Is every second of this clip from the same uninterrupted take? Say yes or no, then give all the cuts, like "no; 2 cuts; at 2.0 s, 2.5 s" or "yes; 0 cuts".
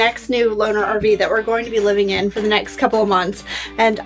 yes; 0 cuts